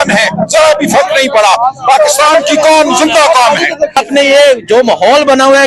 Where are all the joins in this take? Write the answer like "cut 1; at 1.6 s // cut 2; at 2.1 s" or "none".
cut 1; at 4.0 s